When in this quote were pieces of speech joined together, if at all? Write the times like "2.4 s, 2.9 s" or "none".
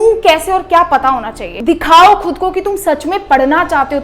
1.5 s